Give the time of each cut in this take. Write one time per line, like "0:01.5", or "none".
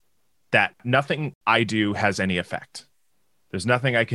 0:01.1